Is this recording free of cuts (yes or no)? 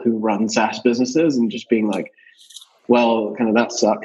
yes